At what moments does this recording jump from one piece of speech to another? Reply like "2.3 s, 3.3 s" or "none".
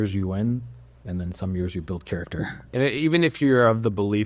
2.6 s